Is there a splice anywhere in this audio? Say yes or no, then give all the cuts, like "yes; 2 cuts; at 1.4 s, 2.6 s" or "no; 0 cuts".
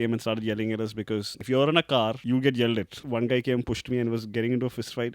yes; 3 cuts; at 1.3 s, 2.2 s, 3.0 s